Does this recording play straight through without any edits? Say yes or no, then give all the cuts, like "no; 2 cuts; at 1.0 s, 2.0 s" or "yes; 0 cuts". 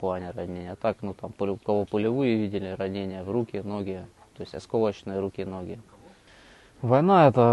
no; 1 cut; at 6.2 s